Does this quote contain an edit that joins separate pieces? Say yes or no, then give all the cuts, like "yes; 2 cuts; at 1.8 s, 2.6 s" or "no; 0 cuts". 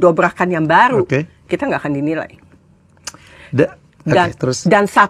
no; 0 cuts